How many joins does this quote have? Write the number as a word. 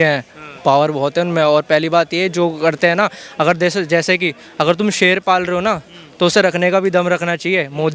zero